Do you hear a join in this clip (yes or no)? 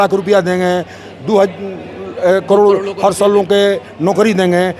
no